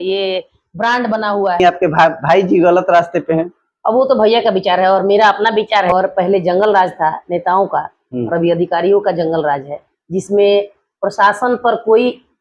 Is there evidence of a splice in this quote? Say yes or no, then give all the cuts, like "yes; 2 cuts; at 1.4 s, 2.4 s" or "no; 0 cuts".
yes; 2 cuts; at 1.6 s, 5.9 s